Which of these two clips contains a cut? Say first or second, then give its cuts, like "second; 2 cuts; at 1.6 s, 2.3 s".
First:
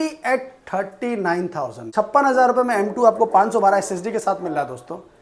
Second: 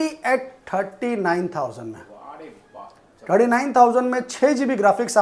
first; 1 cut; at 1.8 s